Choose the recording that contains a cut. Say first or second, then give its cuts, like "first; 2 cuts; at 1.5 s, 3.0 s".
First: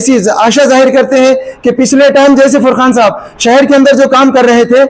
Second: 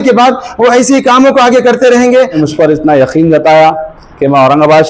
second; 1 cut; at 2.3 s